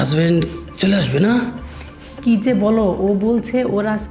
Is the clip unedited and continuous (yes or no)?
yes